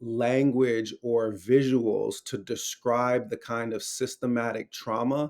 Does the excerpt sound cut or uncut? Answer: uncut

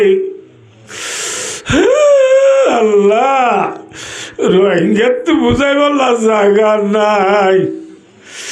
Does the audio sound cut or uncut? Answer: uncut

